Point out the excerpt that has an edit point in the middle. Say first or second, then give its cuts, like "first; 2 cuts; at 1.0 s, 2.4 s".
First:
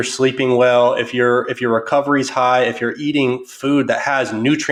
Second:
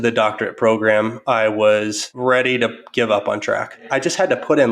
second; 2 cuts; at 2.0 s, 3.9 s